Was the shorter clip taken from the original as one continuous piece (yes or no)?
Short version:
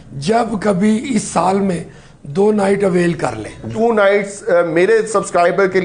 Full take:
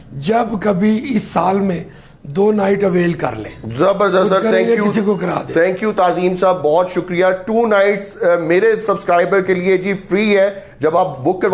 no